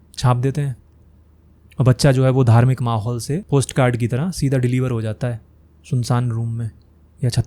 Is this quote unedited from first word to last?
no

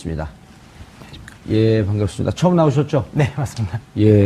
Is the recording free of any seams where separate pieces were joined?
yes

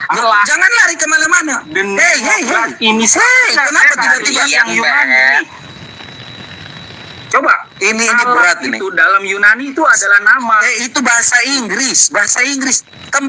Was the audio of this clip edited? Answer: no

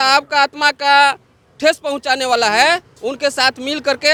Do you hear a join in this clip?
no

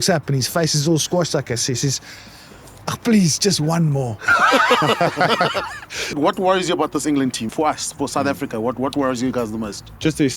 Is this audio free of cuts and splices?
no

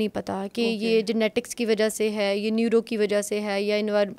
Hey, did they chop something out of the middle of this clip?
no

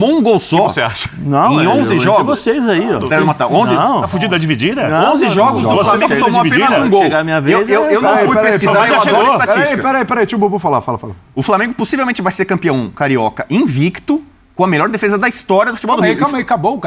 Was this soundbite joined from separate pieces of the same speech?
no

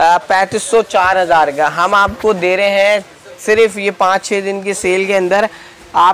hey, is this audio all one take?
yes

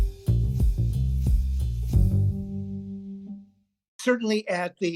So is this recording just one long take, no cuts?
no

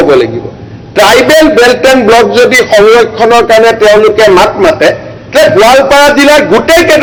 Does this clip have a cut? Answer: no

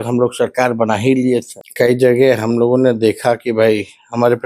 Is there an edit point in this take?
yes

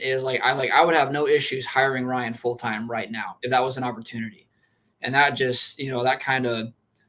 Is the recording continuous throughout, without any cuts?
no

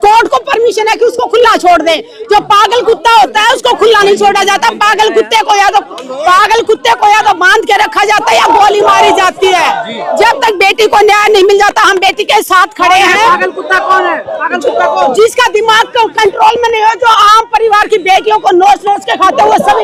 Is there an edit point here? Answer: no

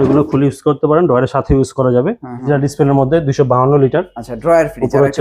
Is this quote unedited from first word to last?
no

